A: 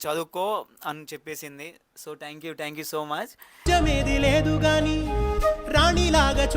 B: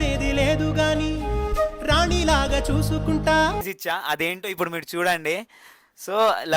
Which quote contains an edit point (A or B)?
B